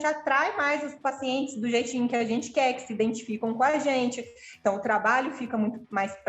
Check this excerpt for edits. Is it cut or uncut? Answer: uncut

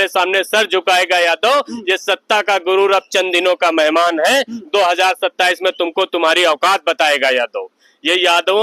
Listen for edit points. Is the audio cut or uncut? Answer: uncut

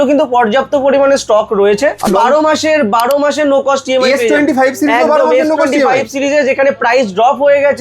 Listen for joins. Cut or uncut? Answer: cut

